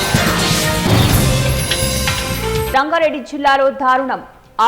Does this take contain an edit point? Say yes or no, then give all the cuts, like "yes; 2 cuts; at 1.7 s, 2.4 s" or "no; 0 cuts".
yes; 1 cut; at 2.7 s